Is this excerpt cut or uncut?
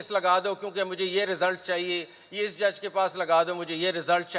uncut